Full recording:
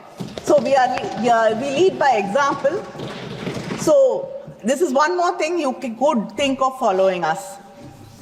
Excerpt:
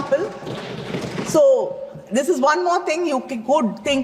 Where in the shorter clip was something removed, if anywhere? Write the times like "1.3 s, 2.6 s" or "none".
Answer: none